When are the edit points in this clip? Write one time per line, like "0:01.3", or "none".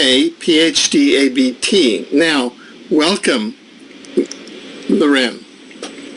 0:03.0